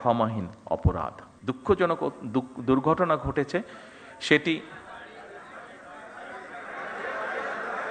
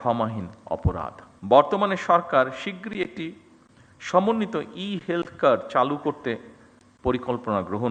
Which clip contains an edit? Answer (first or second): first